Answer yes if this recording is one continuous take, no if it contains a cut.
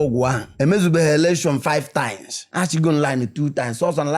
no